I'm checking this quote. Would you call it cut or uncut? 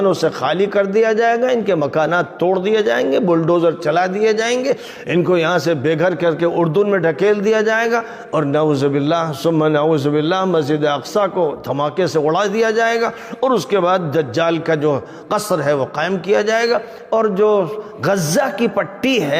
uncut